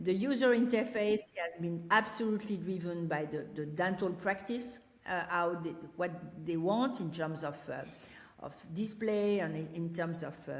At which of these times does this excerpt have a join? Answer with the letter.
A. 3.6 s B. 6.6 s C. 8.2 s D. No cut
D